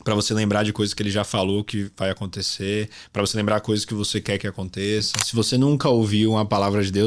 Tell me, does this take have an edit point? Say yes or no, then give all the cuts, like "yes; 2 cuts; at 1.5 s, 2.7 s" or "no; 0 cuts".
yes; 1 cut; at 5.2 s